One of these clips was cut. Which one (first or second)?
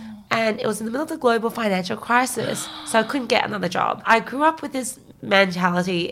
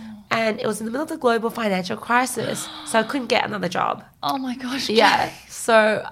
first